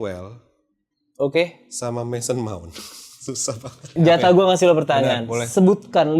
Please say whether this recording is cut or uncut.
cut